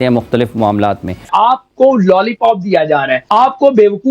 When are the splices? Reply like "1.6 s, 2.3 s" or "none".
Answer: 1.2 s